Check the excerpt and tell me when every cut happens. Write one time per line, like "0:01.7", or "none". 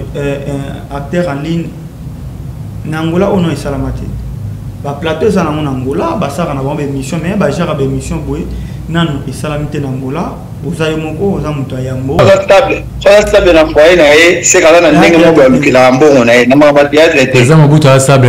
0:12.2